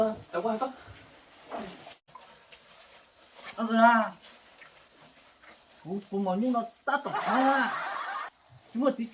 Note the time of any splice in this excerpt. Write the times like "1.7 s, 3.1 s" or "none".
2.0 s